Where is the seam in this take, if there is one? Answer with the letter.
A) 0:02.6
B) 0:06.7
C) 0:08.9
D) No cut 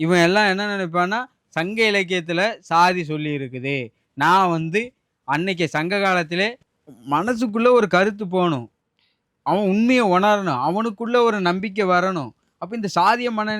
B